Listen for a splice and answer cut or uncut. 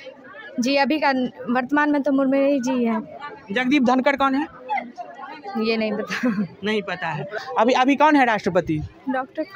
cut